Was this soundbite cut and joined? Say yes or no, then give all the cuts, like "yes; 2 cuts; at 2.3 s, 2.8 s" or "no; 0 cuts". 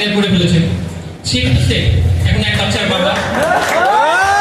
no; 0 cuts